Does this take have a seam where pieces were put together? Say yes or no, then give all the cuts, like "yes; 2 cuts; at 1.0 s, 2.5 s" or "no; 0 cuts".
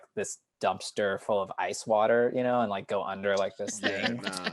no; 0 cuts